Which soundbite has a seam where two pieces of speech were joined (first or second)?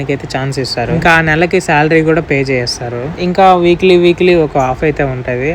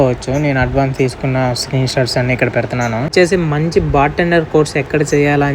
second